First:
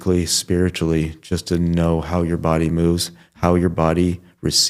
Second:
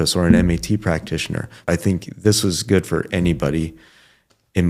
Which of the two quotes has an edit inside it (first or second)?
second